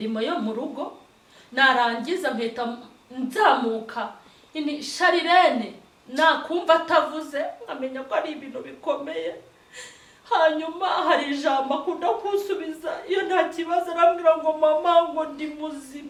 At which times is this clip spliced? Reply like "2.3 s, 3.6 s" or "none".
none